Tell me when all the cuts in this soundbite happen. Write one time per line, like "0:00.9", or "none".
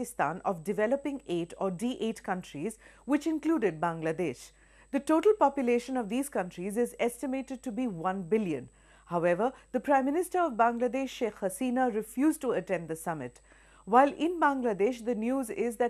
none